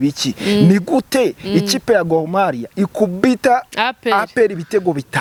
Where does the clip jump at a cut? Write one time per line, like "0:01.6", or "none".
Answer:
none